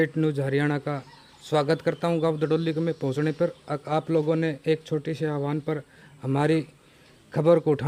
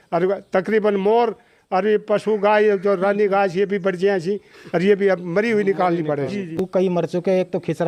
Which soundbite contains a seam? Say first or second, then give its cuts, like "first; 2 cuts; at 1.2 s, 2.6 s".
second; 1 cut; at 6.6 s